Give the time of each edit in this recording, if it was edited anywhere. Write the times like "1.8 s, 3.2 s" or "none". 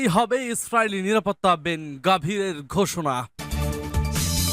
3.3 s